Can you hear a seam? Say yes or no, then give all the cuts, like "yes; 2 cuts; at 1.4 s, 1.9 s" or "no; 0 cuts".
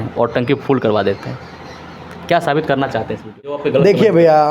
yes; 1 cut; at 3.6 s